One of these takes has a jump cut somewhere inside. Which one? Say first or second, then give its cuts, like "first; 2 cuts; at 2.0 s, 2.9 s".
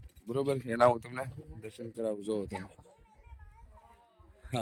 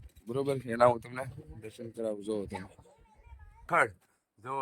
second; 1 cut; at 3.7 s